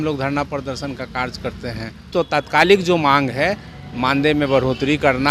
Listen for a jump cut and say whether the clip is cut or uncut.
cut